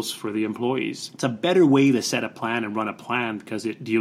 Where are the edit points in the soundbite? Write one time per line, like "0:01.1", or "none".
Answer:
0:01.1